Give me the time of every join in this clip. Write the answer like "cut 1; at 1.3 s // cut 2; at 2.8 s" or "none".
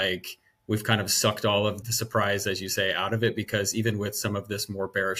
cut 1; at 1.8 s